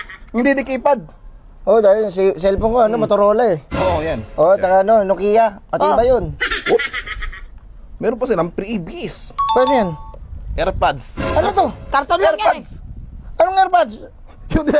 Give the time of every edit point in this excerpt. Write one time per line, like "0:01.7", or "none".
none